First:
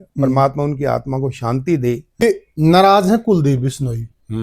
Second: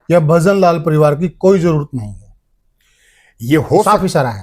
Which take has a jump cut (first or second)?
first